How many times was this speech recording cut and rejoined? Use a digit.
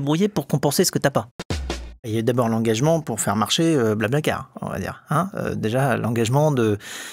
1